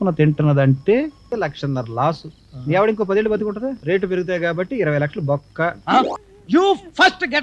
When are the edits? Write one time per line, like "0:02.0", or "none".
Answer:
0:01.3
0:03.7
0:06.3